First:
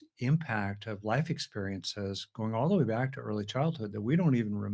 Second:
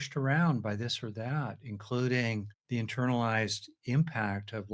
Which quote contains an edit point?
second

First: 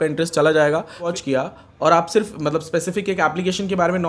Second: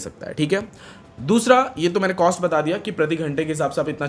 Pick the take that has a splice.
first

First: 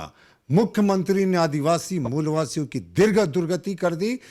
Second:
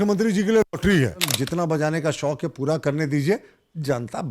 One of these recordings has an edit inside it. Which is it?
second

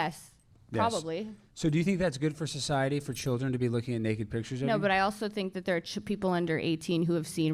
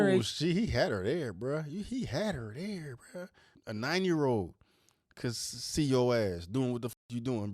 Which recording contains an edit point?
second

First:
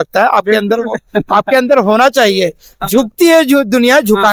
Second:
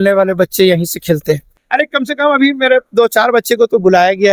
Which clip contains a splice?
second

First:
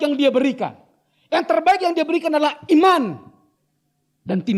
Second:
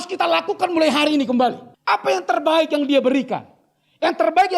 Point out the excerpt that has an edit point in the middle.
second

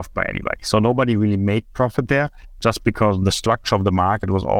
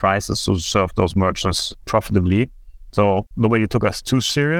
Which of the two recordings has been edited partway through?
second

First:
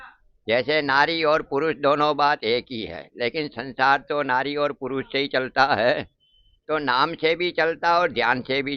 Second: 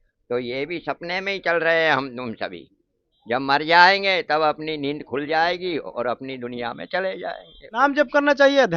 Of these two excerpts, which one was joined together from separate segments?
second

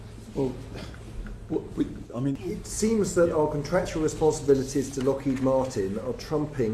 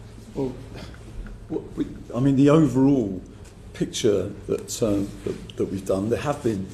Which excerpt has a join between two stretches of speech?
first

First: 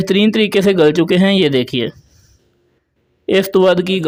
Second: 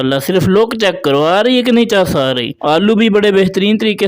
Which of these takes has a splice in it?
second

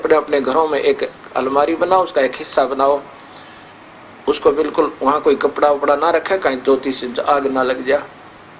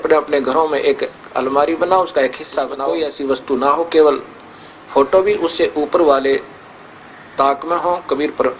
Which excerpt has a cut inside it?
second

